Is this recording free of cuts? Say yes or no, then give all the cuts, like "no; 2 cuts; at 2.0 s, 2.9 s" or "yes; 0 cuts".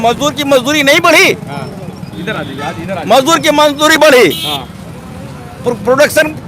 yes; 0 cuts